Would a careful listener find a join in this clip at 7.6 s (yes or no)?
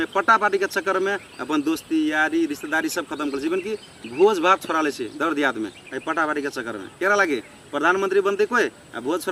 no